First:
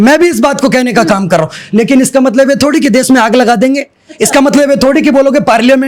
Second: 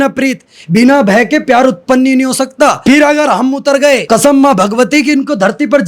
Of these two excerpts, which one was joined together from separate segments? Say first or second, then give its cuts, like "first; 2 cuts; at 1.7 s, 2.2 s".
second; 2 cuts; at 2.8 s, 4.0 s